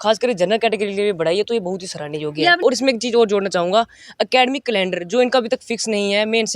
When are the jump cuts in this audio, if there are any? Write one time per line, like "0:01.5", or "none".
0:02.6